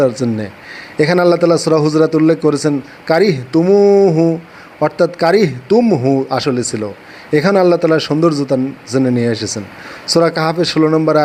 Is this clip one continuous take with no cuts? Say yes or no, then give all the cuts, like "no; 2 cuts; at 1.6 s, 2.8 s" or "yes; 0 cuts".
yes; 0 cuts